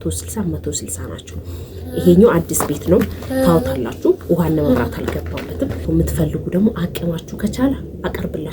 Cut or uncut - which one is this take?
cut